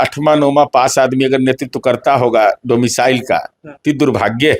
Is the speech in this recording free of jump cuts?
yes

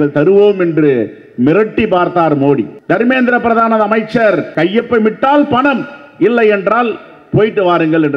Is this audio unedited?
no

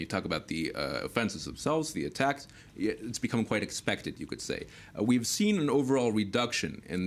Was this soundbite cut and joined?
no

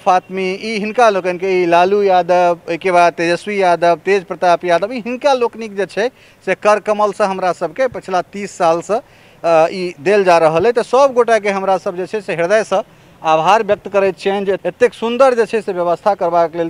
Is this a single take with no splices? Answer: no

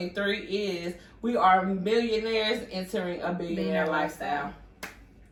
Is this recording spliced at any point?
no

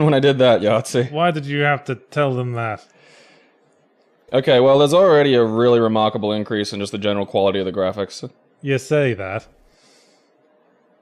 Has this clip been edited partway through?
no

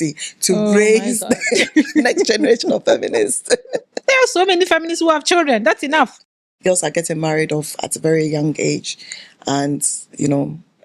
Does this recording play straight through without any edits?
no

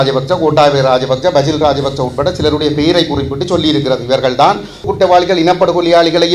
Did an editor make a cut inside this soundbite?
yes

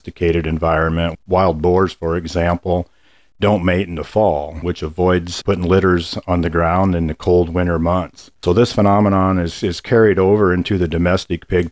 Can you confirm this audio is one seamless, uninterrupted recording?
no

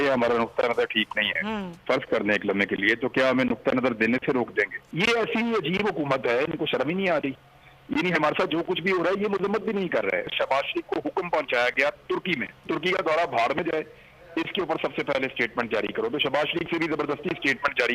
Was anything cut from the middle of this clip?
yes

